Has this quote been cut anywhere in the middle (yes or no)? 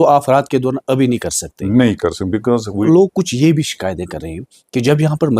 yes